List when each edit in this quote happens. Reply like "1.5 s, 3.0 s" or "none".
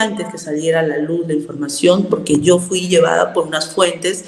none